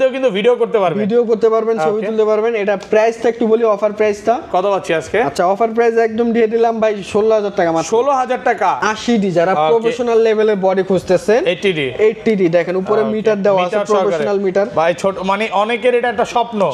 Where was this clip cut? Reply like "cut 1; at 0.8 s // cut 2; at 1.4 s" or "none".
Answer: cut 1; at 8.8 s